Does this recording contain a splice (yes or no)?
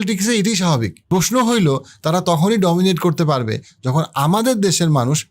yes